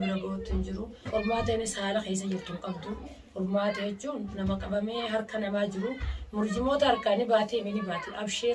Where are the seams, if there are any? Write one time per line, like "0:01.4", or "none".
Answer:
0:01.0